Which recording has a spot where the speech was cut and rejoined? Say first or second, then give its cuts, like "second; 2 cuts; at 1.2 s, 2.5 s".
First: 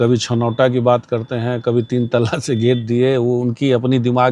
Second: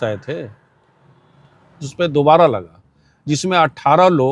second; 1 cut; at 1.8 s